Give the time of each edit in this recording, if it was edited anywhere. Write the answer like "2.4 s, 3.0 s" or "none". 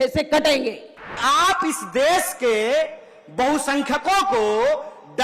1.2 s